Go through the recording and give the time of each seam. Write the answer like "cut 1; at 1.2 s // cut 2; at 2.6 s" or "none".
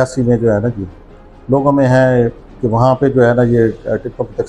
none